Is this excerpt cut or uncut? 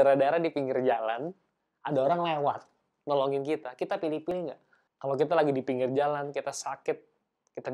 cut